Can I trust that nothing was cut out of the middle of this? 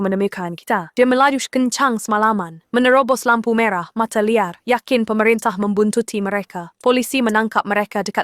no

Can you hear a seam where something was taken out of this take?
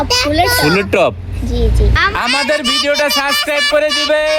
yes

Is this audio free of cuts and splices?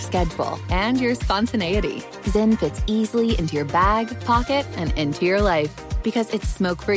yes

